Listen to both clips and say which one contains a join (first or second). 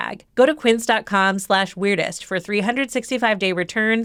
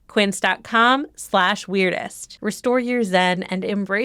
second